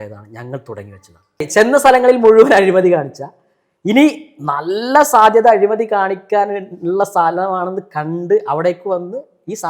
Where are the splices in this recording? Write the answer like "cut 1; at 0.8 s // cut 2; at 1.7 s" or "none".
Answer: cut 1; at 1.5 s